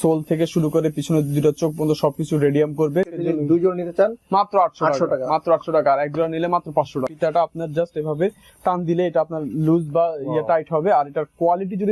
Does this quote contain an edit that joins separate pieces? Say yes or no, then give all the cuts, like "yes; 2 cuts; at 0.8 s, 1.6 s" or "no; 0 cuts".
yes; 2 cuts; at 3.1 s, 7.1 s